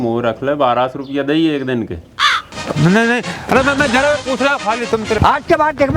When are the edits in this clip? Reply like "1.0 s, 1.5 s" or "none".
2.5 s, 5.2 s